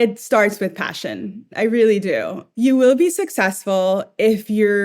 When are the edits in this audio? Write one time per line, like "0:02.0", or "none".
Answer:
0:02.4